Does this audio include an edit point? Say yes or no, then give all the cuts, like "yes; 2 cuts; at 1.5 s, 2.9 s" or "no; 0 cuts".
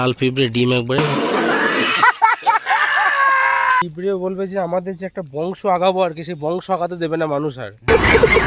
yes; 2 cuts; at 1.0 s, 3.8 s